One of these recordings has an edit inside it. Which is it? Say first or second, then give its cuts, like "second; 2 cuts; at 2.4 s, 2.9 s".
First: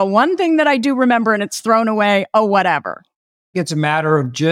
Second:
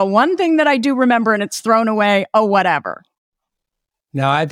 first; 1 cut; at 3.5 s